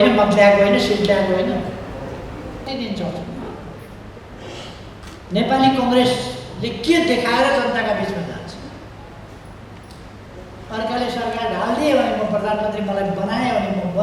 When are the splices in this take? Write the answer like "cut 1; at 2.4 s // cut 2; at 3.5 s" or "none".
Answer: cut 1; at 2.7 s